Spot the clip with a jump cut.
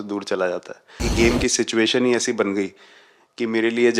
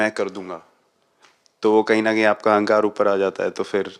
first; 1 cut; at 1.1 s

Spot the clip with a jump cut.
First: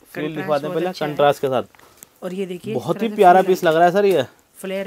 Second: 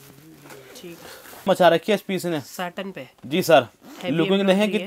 second; 1 cut; at 1.4 s

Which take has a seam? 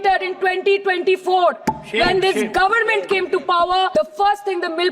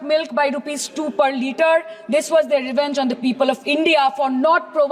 first; 1 cut; at 3.9 s

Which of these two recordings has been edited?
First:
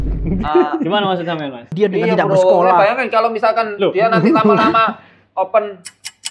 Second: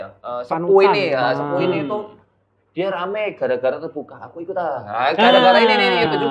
first; 1 cut; at 1.7 s

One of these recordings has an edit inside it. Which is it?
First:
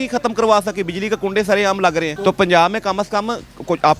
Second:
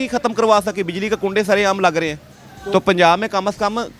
first; 1 cut; at 2.1 s

